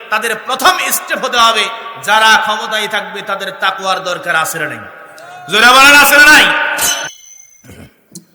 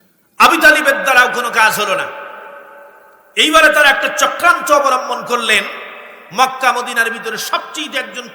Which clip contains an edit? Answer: first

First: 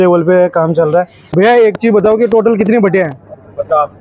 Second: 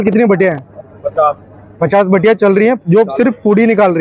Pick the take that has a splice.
first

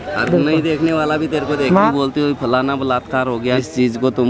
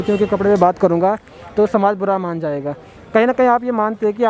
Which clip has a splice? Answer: first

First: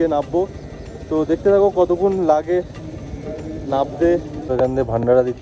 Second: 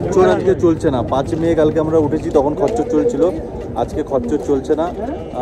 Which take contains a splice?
first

